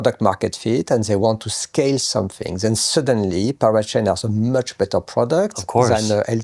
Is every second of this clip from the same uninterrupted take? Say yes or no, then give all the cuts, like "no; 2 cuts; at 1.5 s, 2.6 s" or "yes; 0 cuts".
yes; 0 cuts